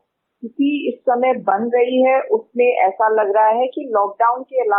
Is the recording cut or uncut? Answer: uncut